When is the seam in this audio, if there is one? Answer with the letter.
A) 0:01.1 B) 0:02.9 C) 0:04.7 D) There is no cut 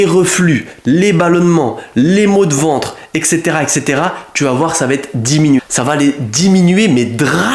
D